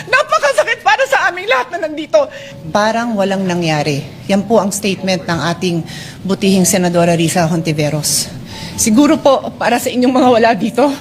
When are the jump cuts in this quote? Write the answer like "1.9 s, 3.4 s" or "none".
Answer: 2.4 s